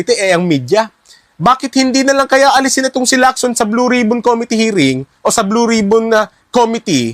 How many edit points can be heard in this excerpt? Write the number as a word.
one